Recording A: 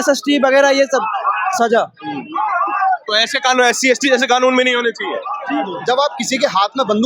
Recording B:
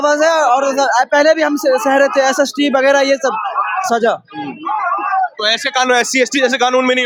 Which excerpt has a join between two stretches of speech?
A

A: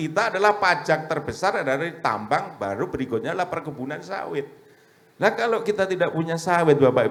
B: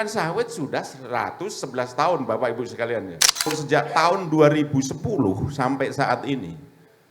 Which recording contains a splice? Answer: B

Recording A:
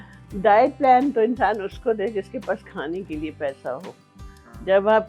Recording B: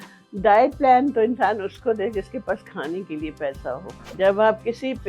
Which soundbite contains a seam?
B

